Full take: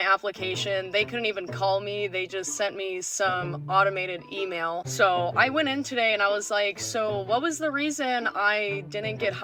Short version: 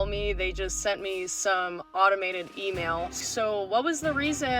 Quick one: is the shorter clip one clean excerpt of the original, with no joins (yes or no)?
no